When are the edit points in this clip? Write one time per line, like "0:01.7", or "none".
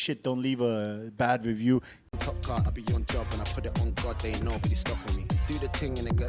0:02.0